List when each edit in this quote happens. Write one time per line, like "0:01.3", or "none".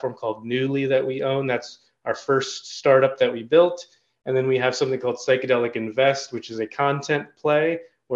none